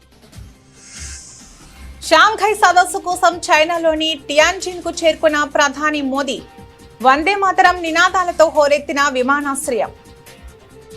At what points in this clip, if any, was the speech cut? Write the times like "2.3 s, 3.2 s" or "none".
1.5 s